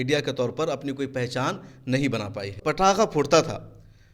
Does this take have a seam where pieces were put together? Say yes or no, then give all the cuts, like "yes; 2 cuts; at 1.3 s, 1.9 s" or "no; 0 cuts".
yes; 1 cut; at 2.6 s